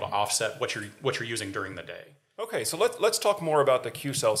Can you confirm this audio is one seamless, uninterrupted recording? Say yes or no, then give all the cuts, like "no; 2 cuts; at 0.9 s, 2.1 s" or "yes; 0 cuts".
no; 1 cut; at 2.5 s